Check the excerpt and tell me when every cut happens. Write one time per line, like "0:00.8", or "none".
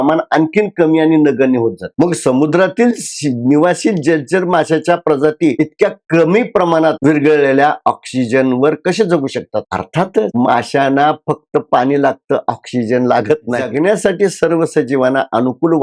0:13.7